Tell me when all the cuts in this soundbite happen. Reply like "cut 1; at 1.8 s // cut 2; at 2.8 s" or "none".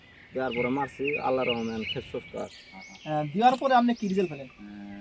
cut 1; at 2.7 s